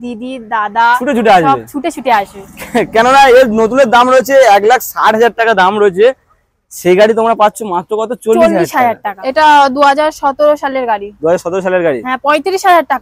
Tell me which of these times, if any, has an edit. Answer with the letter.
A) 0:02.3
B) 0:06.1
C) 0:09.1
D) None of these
C